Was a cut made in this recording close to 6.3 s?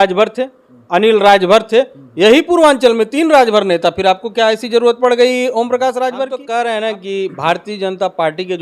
yes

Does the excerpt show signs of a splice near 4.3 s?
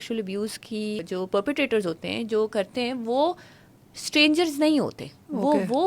no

